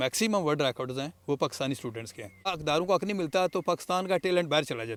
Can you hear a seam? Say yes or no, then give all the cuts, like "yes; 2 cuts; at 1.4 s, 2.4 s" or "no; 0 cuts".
no; 0 cuts